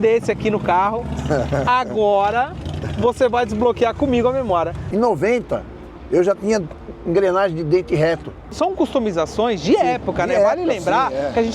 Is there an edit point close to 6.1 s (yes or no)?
no